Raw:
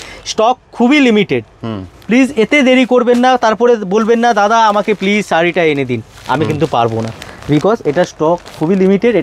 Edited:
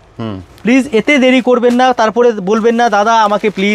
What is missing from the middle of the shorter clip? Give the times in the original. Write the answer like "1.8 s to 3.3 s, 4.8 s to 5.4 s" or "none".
none